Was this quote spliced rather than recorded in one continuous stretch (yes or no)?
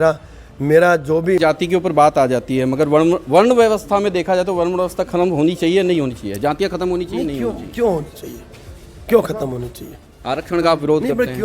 yes